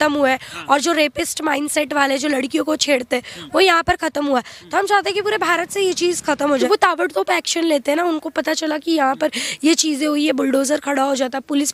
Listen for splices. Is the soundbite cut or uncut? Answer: uncut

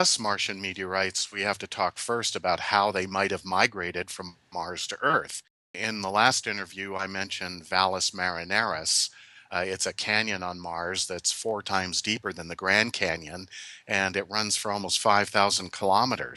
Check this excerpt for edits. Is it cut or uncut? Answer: uncut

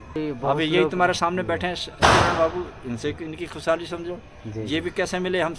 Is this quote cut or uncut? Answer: uncut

